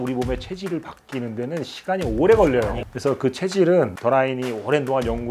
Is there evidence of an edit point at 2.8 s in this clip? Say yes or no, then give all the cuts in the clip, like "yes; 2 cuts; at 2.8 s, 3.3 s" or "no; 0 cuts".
yes; 1 cut; at 2.8 s